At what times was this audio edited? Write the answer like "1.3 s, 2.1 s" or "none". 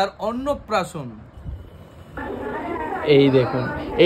none